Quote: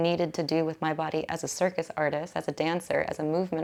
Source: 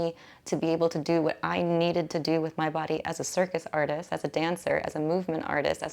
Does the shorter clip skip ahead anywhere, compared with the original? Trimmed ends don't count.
no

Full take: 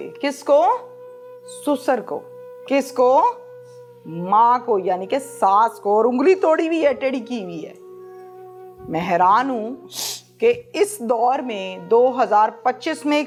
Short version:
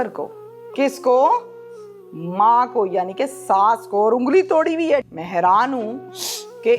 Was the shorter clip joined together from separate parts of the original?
yes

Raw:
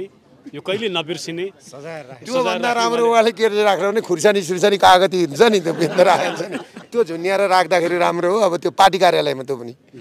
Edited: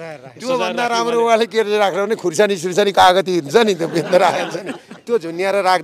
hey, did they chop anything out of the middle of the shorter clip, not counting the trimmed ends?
no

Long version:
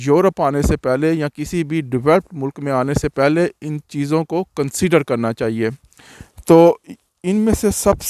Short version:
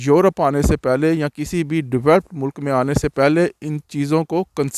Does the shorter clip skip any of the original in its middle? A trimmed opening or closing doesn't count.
no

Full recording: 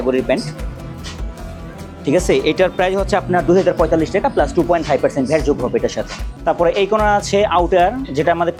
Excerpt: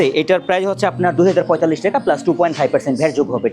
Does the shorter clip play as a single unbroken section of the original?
yes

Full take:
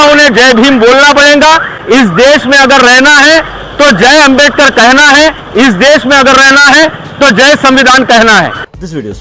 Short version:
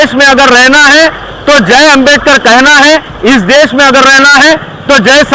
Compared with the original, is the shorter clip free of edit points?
yes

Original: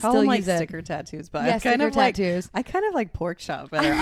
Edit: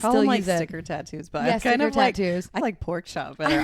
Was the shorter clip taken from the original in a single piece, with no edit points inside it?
no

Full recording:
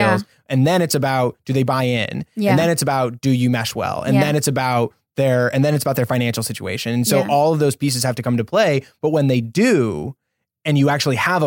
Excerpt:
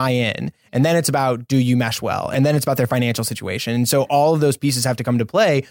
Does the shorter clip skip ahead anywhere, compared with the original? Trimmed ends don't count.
yes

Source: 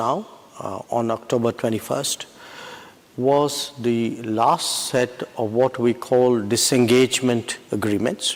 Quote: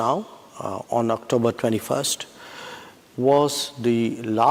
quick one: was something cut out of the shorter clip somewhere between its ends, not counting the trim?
no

